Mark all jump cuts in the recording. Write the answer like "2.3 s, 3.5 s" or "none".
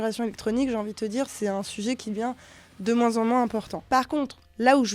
1.3 s, 3.7 s